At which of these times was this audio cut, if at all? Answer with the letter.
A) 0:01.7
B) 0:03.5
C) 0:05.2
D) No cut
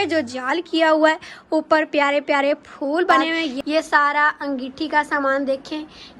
B